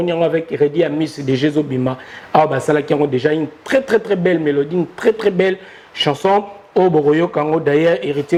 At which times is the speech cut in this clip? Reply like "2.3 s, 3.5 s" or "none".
none